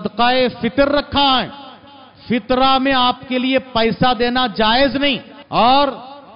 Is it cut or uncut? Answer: cut